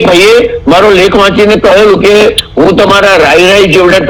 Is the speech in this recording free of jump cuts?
yes; 0 cuts

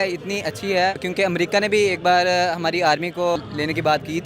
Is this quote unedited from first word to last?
no; 2 cuts; at 1.1 s, 3.4 s

